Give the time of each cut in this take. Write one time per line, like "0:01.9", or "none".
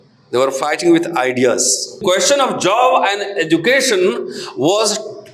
0:02.0

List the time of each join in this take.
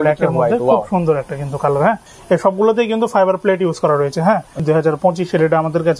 0:02.1
0:04.6

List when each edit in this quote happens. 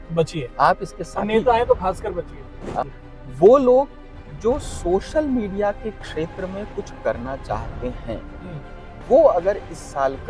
0:02.8

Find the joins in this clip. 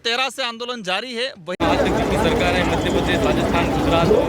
0:01.6

